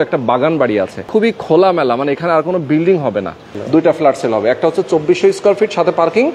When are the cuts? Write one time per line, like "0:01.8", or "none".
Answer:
0:01.0
0:03.5